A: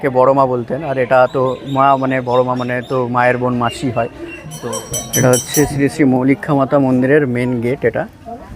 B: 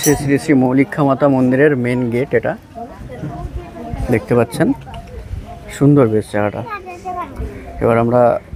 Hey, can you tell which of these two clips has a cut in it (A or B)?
A